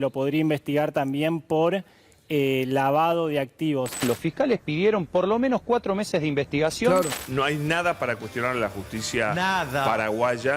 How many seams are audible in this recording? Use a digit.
2